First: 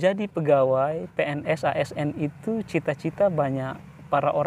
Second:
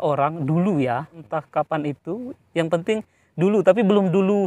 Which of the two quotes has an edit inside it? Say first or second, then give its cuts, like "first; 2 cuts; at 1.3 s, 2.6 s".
second; 1 cut; at 1.2 s